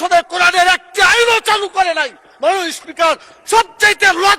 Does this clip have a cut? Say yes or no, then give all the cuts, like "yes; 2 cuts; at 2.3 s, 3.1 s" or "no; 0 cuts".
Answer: no; 0 cuts